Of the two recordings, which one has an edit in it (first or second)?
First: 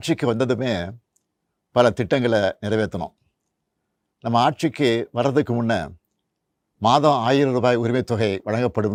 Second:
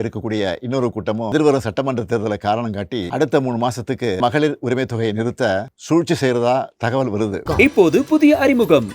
second